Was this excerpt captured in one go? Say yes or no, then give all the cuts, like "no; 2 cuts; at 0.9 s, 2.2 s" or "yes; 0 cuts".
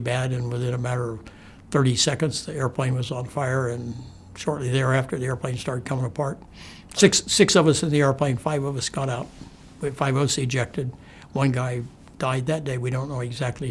yes; 0 cuts